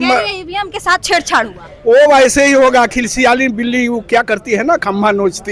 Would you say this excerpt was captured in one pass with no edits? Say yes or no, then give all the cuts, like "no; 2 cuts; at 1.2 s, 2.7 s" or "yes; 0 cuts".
yes; 0 cuts